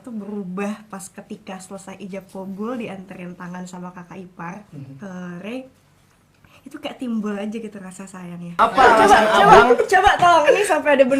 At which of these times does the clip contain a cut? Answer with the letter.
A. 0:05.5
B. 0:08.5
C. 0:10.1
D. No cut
B